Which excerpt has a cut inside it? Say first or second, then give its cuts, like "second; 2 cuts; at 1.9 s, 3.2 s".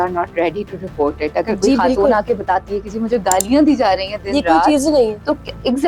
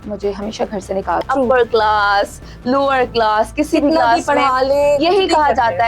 second; 1 cut; at 1.2 s